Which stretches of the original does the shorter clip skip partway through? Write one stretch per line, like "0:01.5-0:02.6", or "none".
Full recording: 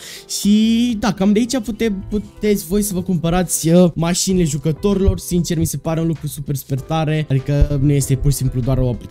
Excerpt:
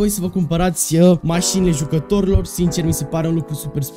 none